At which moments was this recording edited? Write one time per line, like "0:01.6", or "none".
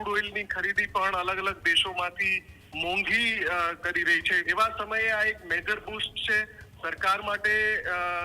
0:04.4